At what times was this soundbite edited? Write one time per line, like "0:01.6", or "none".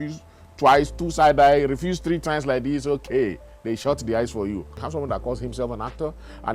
0:04.8